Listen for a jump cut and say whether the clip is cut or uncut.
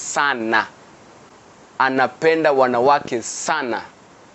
uncut